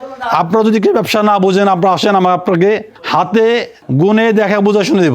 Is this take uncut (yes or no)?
no